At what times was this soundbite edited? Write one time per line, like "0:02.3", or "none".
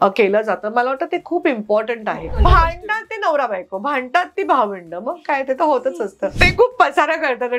0:02.4
0:06.3

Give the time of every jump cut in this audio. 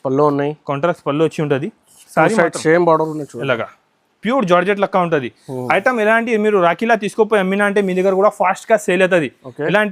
none

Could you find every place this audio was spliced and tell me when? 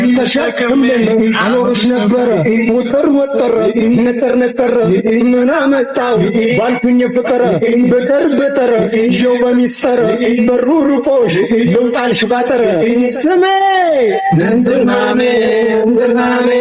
none

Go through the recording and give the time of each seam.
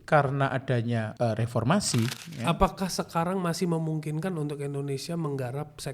0:01.1
0:02.2

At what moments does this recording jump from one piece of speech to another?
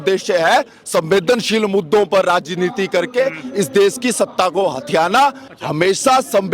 none

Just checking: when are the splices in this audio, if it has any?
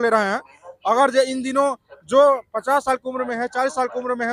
none

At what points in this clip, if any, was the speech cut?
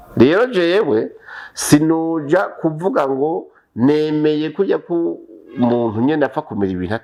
none

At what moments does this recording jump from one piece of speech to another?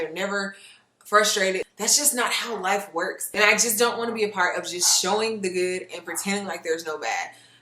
0:01.7

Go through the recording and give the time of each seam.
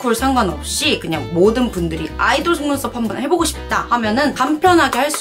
none

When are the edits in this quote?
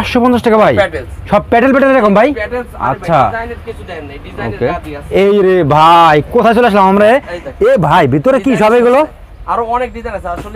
none

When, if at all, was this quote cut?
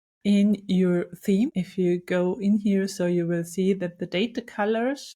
0:01.6

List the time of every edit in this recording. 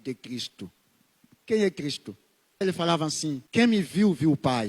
0:02.6
0:03.4

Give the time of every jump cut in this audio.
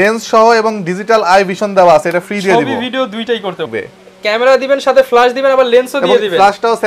0:03.6

